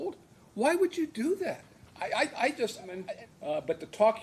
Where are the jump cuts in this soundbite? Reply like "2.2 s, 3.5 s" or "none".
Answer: 3.0 s